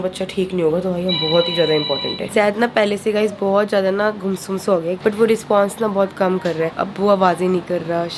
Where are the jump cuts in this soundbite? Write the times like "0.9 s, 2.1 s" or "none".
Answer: 2.2 s, 5.0 s, 6.7 s